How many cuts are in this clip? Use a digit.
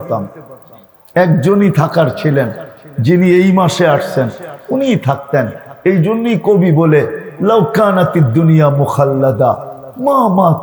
0